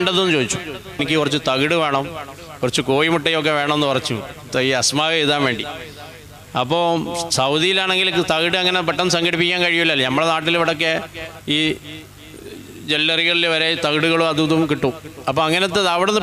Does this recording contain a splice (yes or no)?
yes